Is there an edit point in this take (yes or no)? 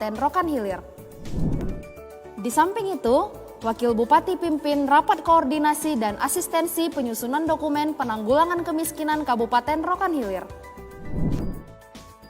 yes